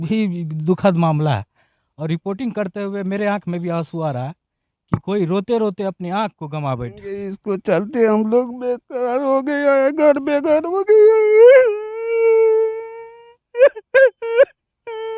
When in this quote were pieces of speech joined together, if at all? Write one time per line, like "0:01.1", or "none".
0:07.0